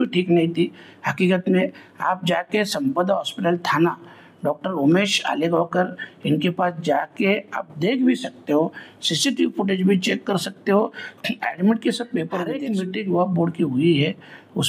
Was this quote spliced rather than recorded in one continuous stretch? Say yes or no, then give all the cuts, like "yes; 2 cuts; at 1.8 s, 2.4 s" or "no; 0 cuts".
yes; 1 cut; at 12.6 s